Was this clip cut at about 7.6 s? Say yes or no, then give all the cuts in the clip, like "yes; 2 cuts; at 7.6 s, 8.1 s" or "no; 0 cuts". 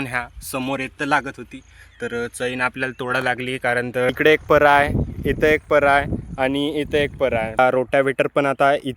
yes; 2 cuts; at 4.1 s, 7.6 s